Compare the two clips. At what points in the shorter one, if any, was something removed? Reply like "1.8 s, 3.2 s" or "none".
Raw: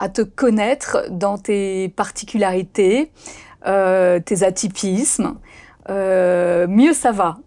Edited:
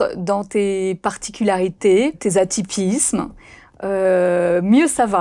2.2 s